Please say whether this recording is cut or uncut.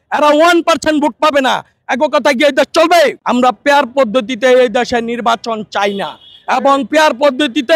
cut